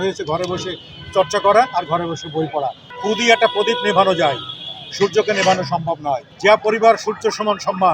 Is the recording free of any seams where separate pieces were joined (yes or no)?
no